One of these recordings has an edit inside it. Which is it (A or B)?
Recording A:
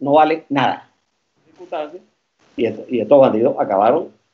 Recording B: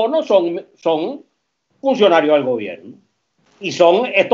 A